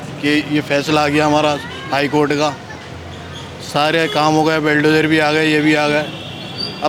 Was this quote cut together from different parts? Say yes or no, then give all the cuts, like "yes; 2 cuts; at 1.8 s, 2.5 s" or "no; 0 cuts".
no; 0 cuts